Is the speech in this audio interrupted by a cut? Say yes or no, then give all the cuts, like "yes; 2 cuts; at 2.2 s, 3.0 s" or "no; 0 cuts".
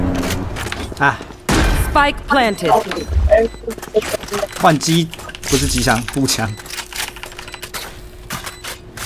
no; 0 cuts